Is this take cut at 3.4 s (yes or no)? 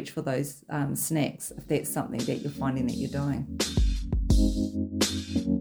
yes